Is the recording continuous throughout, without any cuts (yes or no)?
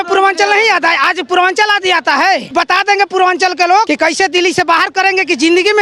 no